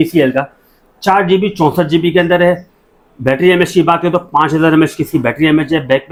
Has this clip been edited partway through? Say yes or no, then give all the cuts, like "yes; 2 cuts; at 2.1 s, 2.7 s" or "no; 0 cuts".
no; 0 cuts